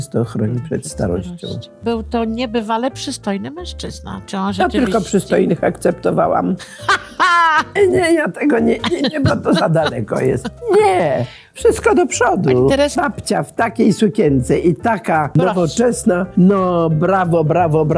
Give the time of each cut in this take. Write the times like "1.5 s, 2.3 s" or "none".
1.8 s, 7.7 s, 12.9 s, 15.3 s, 16.3 s